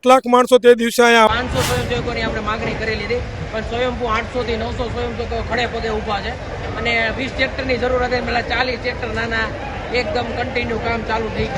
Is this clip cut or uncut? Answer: cut